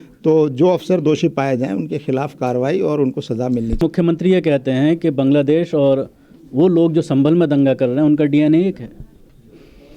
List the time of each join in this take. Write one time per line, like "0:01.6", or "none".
0:03.8